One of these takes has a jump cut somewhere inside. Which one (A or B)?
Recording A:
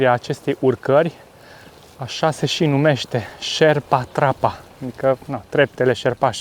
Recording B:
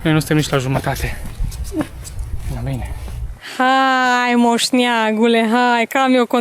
B